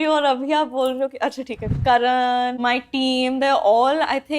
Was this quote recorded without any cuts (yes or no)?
no